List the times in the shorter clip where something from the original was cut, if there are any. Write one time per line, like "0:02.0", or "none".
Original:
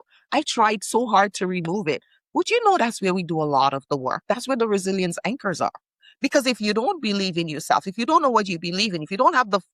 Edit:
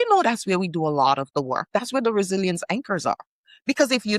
none